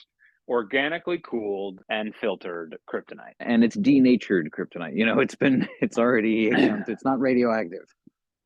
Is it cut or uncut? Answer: cut